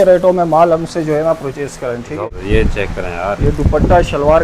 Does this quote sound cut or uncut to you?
cut